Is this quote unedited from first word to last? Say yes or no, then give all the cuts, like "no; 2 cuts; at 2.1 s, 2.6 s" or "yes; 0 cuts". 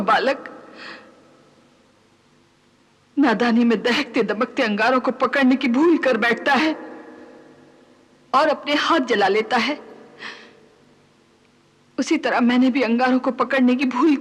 yes; 0 cuts